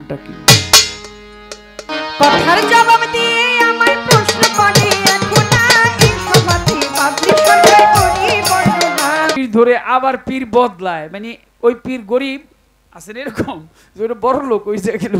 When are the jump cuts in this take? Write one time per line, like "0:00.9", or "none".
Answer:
0:01.9
0:09.4